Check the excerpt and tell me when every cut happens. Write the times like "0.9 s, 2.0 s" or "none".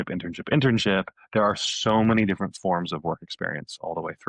none